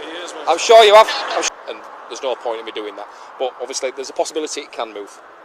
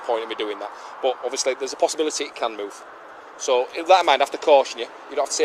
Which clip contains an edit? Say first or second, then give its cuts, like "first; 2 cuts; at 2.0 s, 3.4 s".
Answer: first; 1 cut; at 1.3 s